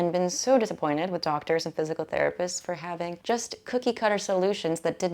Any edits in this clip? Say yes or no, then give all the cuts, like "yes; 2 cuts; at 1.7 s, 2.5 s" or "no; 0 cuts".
yes; 1 cut; at 3.2 s